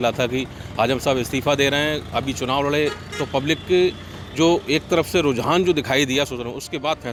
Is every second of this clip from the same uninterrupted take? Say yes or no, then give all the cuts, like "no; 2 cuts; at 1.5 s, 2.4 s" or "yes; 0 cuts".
yes; 0 cuts